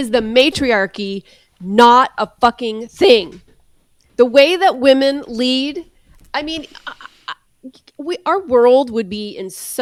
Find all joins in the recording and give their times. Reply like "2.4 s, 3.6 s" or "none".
none